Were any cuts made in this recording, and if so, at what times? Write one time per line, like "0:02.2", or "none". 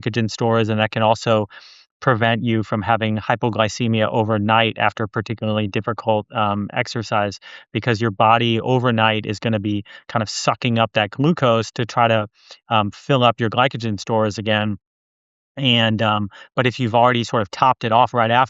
none